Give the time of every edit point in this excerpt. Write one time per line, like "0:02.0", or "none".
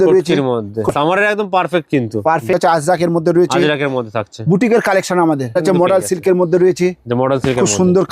0:00.9
0:02.5
0:05.5